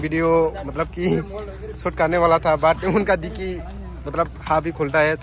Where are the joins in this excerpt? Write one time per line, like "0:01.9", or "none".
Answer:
none